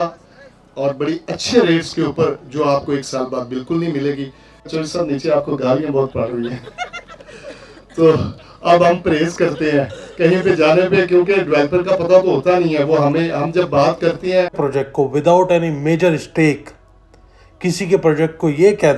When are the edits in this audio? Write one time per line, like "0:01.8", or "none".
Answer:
0:04.7
0:14.6